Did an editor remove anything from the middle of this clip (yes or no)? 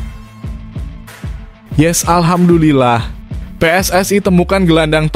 yes